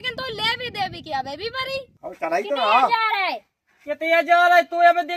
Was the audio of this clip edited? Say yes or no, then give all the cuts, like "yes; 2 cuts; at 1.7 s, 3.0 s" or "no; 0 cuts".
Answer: yes; 1 cut; at 1.9 s